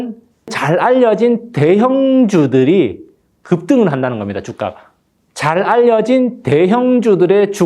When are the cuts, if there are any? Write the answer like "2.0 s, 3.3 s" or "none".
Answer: none